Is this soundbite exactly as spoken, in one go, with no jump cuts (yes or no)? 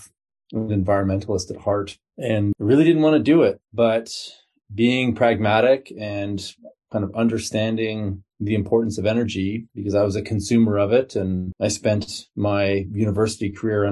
no